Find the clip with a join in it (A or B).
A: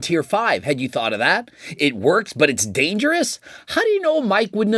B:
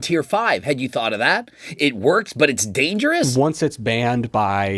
B